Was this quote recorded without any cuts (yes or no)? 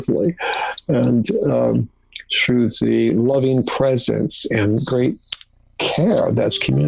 yes